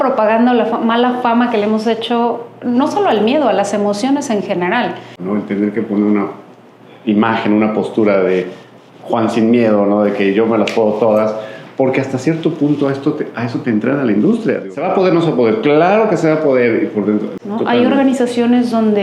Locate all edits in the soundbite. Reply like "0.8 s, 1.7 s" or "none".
5.1 s, 14.6 s, 17.4 s

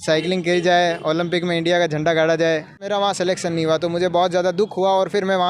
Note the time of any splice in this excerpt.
2.8 s

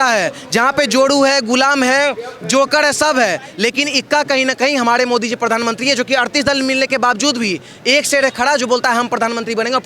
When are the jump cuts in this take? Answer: none

